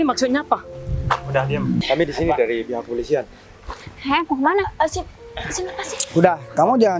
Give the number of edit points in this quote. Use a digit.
0